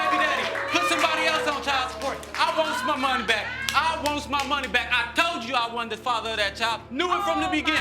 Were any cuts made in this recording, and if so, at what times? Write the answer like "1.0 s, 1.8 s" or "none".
6.9 s